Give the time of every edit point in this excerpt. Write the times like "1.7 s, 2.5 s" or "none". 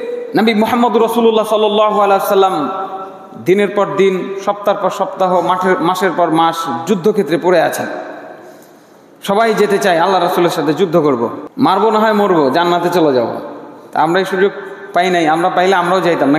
11.4 s

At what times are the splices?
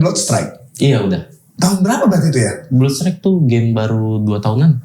1.4 s

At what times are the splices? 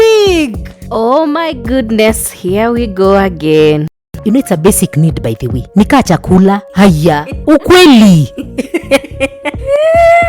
4.1 s

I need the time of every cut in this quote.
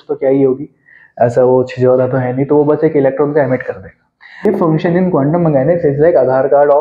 4.4 s

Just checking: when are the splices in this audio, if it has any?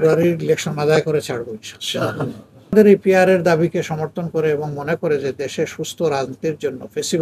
2.7 s

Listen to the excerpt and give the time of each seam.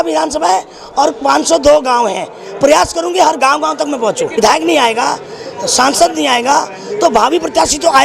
4.4 s

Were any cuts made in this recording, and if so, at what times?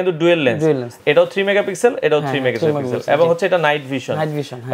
0.9 s

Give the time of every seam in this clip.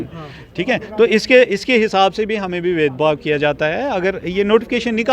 none

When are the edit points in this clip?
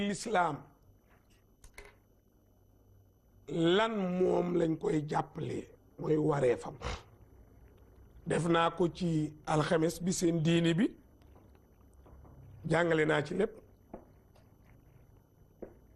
none

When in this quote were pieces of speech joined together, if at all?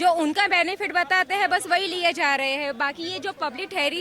none

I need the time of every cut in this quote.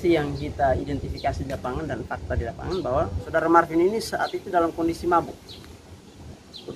3.2 s

